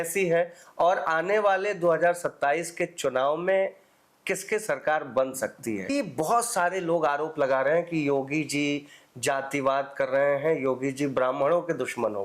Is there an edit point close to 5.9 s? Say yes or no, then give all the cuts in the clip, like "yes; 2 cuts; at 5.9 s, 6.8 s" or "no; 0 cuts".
yes; 1 cut; at 5.9 s